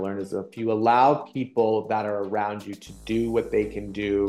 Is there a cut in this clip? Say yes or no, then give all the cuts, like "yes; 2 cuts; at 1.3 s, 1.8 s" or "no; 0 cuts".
no; 0 cuts